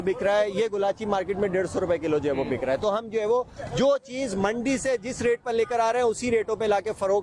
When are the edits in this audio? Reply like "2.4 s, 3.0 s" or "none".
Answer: none